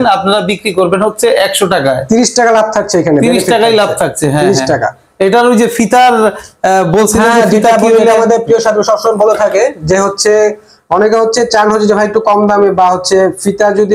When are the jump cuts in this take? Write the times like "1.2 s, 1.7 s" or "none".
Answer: none